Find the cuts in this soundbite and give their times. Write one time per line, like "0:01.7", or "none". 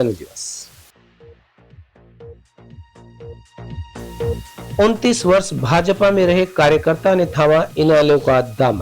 none